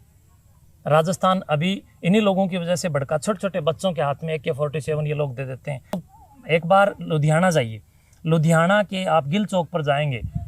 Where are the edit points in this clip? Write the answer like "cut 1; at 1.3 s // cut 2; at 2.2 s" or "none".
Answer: cut 1; at 6.1 s

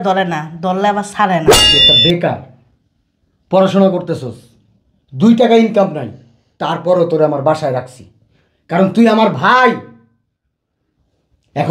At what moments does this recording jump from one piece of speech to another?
cut 1; at 1.6 s

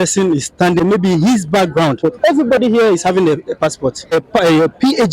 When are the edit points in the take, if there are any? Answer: cut 1; at 0.8 s // cut 2; at 2.0 s // cut 3; at 4.1 s

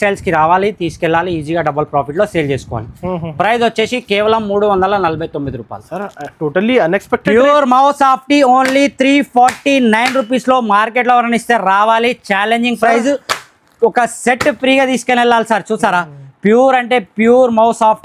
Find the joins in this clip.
none

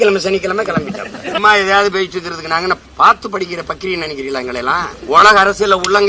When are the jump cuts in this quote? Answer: cut 1; at 1.4 s // cut 2; at 2.9 s // cut 3; at 5.0 s

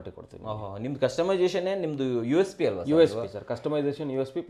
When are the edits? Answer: none

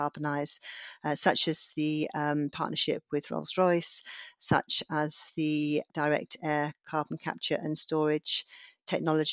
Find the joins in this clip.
cut 1; at 5.9 s

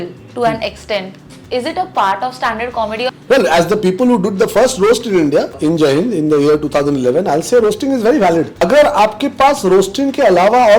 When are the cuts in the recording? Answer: cut 1; at 3.2 s // cut 2; at 5.6 s // cut 3; at 8.6 s

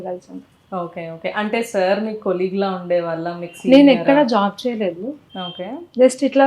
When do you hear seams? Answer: cut 1; at 5.1 s

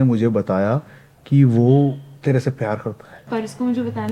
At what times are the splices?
cut 1; at 2.1 s // cut 2; at 3.2 s

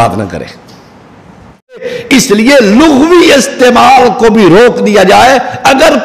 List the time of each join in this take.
cut 1; at 1.8 s

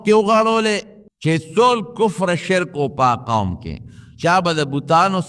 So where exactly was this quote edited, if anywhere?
cut 1; at 1.5 s

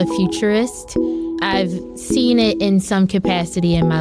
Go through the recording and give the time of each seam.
cut 1; at 1.3 s

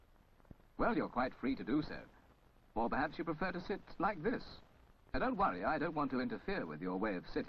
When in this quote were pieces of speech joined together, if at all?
none

